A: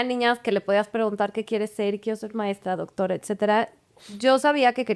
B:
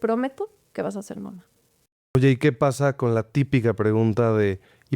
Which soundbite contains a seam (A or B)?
B